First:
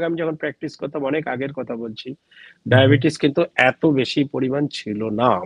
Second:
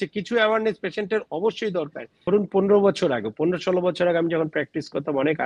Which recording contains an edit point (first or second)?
second